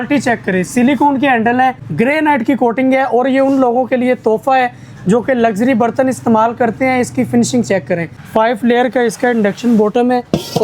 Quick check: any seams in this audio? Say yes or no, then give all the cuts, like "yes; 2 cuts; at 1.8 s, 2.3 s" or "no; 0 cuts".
yes; 2 cuts; at 1.8 s, 8.2 s